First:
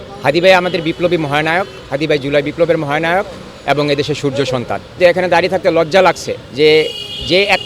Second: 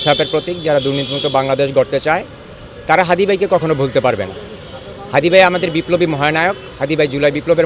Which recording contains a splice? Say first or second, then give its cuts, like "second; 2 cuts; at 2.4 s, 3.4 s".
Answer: first; 1 cut; at 4.9 s